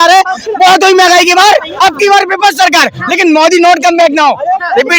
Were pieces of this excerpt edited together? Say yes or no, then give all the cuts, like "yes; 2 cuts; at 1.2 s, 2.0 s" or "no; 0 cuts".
no; 0 cuts